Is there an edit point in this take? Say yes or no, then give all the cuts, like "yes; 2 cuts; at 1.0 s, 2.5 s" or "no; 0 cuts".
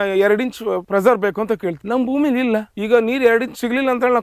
yes; 3 cuts; at 0.8 s, 1.8 s, 2.7 s